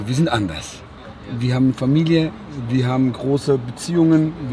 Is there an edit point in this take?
no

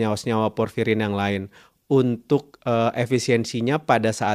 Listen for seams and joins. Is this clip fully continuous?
yes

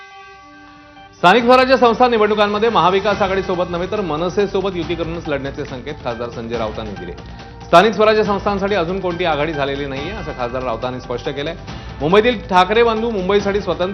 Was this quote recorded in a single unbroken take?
yes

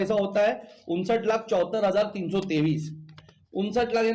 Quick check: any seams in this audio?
no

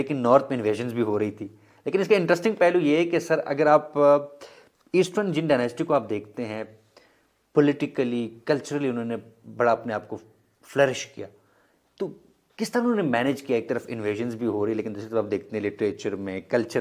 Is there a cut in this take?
no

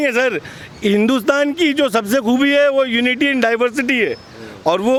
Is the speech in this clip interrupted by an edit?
no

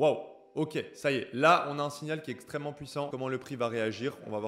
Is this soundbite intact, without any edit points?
no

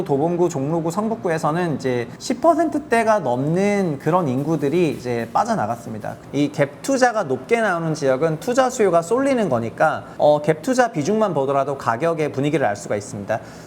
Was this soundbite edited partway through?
yes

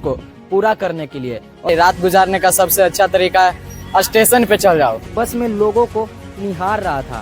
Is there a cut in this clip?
yes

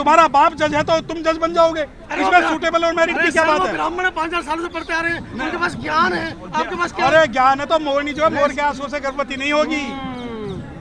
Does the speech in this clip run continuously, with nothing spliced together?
yes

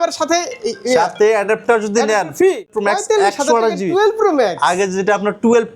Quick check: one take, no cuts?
no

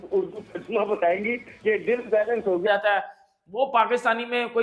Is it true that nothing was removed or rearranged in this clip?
no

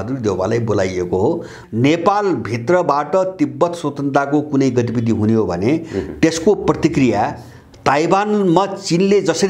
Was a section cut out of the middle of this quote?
yes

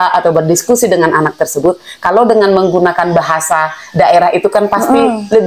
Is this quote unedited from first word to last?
yes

